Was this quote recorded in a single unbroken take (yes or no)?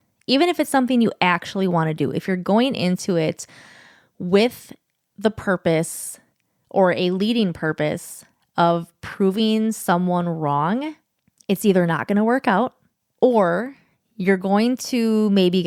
yes